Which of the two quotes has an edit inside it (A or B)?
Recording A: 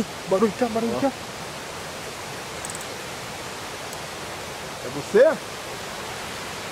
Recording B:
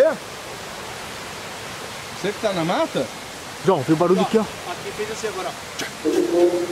A